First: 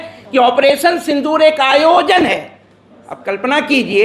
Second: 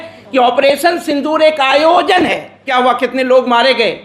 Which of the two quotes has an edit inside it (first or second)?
second